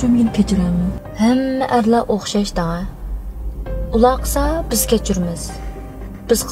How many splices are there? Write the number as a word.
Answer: one